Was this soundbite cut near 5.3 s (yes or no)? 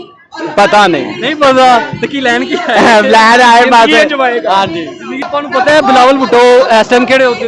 yes